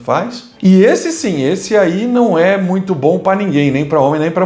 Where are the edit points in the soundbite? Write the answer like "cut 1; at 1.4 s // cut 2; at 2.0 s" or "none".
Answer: none